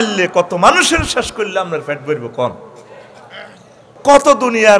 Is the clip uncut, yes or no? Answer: no